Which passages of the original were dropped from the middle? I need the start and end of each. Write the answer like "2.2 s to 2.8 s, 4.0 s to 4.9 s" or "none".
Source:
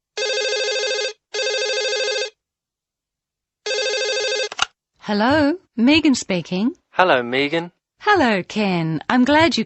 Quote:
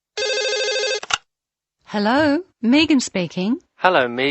1.3 s to 4.5 s